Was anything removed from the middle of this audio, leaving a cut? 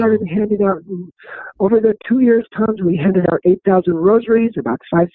no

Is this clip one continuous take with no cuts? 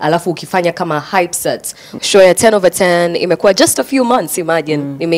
no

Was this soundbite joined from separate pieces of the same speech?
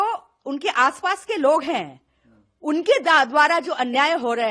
no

